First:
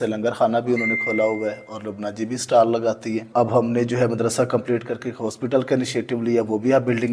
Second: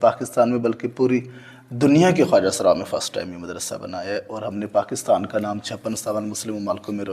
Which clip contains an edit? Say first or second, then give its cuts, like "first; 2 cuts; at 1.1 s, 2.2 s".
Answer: first; 1 cut; at 3.2 s